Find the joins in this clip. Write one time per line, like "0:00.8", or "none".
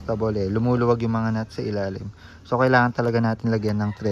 none